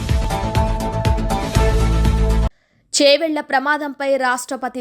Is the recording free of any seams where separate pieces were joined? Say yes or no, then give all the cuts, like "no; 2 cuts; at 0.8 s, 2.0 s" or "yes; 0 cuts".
no; 1 cut; at 2.5 s